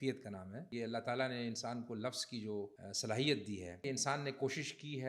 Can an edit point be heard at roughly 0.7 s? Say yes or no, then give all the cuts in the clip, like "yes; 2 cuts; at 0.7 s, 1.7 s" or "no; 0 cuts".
yes; 3 cuts; at 0.7 s, 2.8 s, 3.8 s